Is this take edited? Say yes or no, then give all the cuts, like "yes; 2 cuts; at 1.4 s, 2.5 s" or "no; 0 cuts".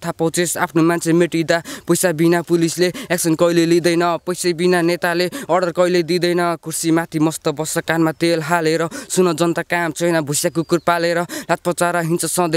no; 0 cuts